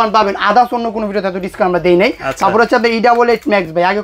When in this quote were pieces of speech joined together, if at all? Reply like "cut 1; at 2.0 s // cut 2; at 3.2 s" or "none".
none